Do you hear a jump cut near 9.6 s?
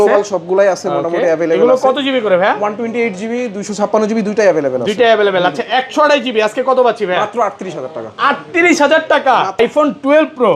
yes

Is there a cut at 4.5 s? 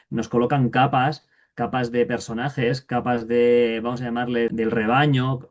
yes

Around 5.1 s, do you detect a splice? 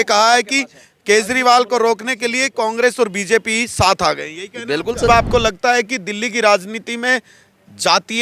yes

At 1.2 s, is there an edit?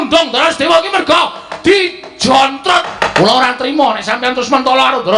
no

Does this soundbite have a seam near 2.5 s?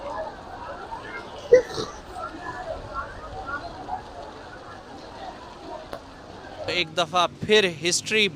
no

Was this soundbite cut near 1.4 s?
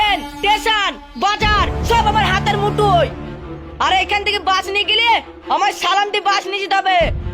no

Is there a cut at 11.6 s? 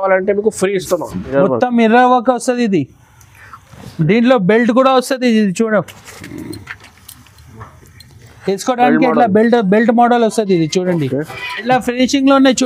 yes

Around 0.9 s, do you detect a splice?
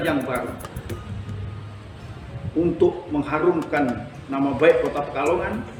no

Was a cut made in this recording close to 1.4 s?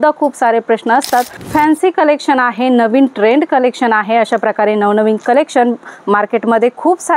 yes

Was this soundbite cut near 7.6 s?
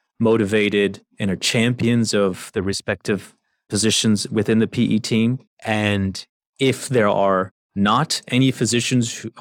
yes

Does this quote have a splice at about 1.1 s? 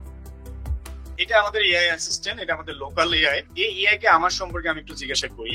yes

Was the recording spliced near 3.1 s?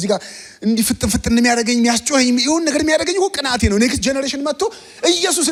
no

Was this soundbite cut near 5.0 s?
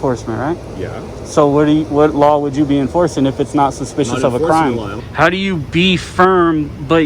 yes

